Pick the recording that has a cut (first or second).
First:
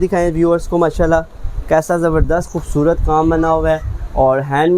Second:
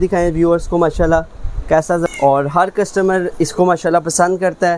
second